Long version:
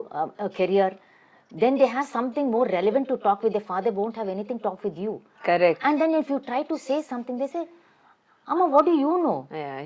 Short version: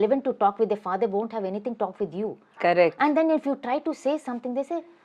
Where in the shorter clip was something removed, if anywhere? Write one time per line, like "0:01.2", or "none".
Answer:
none